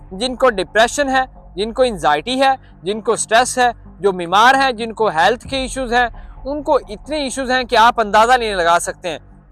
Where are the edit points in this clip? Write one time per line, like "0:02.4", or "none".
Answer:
none

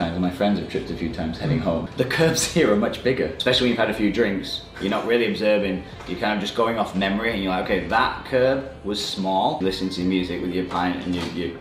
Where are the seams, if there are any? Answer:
0:01.9
0:03.3
0:09.6

